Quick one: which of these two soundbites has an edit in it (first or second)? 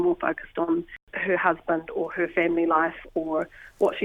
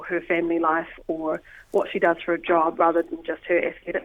first